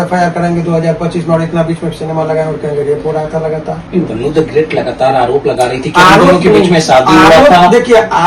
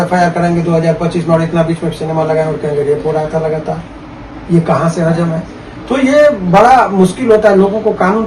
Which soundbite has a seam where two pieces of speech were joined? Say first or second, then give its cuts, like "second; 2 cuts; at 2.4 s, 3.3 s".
first; 1 cut; at 3.8 s